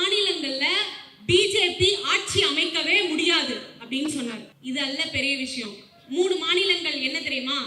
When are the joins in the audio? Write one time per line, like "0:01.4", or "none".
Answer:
0:04.5